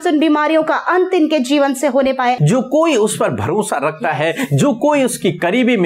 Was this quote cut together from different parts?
yes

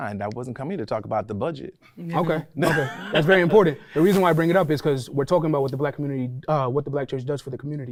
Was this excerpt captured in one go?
yes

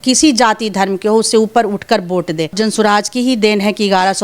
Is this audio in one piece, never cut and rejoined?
no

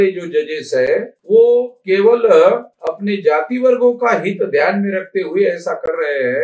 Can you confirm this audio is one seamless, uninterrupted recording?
yes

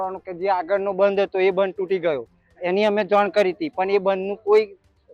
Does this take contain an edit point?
no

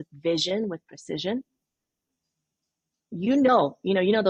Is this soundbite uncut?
yes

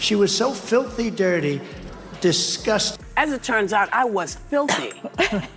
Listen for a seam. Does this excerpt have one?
no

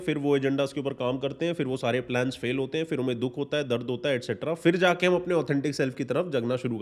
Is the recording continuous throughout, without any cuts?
yes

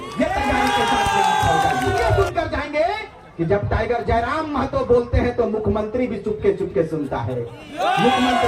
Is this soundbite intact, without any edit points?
no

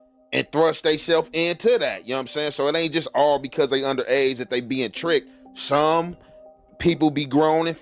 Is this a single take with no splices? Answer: yes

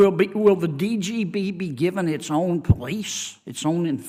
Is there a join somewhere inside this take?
no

